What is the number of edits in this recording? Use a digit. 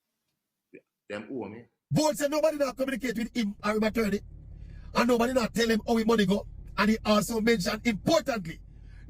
1